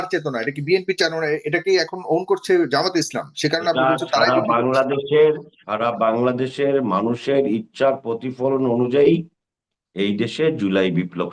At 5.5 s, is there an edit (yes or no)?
no